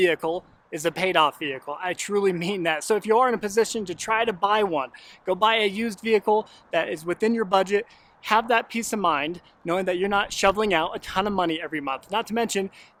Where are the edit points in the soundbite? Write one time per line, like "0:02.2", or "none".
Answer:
none